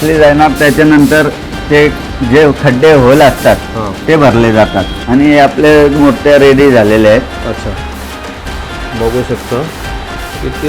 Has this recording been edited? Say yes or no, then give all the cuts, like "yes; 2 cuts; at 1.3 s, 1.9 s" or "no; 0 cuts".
yes; 1 cut; at 5.2 s